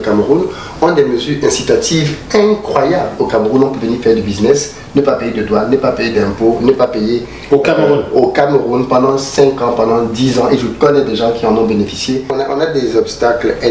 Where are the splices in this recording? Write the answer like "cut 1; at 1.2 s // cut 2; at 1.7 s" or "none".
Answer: cut 1; at 12.2 s

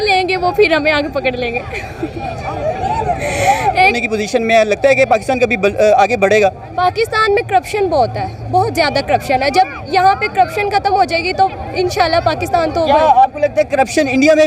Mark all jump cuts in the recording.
cut 1; at 4.0 s

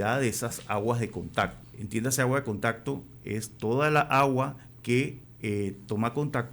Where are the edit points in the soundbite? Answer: cut 1; at 1.7 s // cut 2; at 4.9 s

